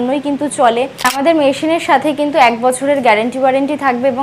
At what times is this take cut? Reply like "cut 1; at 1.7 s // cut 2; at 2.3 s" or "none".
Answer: cut 1; at 1.1 s